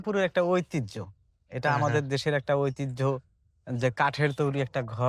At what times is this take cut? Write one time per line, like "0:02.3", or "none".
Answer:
none